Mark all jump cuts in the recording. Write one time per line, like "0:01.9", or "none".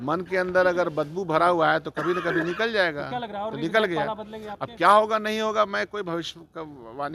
none